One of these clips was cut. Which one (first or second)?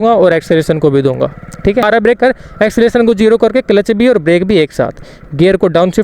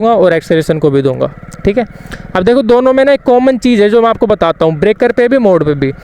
first